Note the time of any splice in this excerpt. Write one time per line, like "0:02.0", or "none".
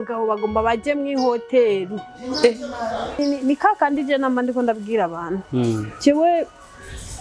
0:03.2